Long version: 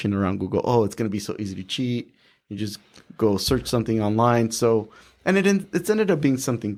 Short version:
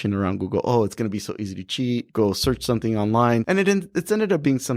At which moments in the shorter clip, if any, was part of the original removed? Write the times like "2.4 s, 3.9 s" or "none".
2.1 s, 3.4 s

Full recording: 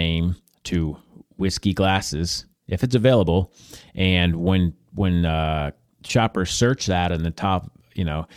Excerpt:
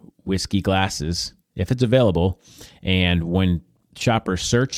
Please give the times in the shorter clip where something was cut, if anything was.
3.7 s

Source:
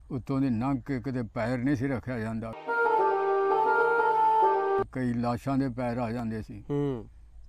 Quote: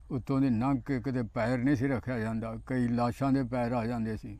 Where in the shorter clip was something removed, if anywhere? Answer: 2.6 s

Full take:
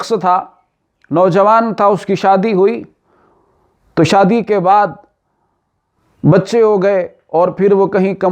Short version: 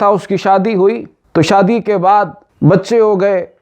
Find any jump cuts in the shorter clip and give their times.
1.1 s, 2.4 s

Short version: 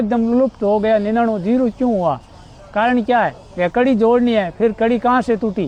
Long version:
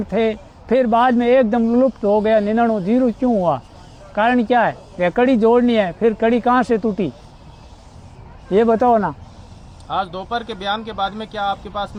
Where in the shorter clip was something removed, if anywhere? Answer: none

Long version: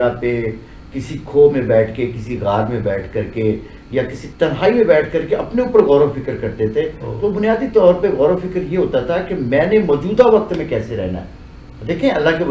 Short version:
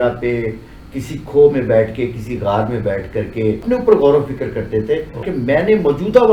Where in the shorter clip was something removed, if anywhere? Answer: 3.6 s, 5.2 s

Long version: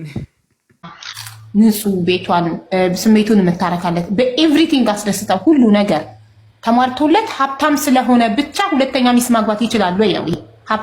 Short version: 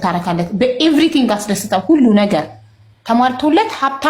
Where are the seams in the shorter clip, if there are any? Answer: none

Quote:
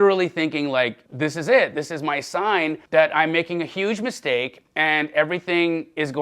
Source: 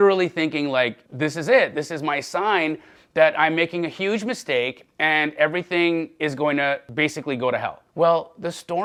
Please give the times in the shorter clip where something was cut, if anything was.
2.8 s

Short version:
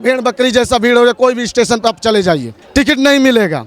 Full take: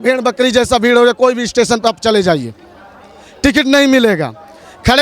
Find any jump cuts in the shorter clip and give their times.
2.5 s

